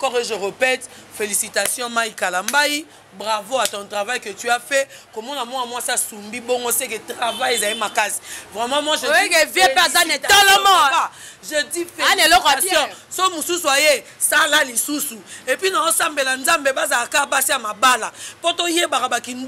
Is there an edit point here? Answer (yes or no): no